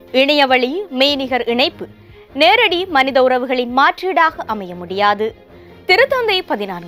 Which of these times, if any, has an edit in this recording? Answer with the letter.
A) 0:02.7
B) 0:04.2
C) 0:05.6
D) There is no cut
D